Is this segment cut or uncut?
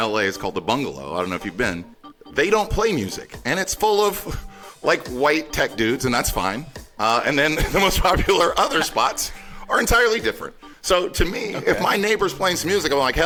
uncut